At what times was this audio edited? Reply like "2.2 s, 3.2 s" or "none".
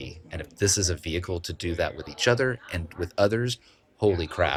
none